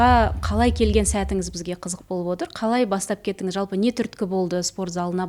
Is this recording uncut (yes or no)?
yes